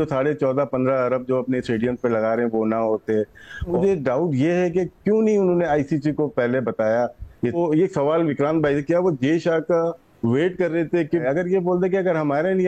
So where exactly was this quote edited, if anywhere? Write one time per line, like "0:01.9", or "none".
0:03.7
0:07.6
0:11.2